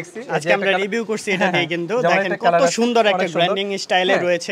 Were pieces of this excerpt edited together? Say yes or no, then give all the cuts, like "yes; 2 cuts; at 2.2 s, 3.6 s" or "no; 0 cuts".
no; 0 cuts